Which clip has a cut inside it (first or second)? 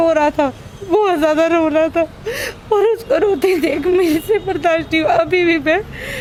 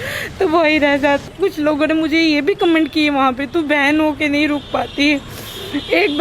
second